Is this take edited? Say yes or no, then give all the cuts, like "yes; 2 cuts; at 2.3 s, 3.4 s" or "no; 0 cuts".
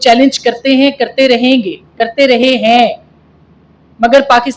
no; 0 cuts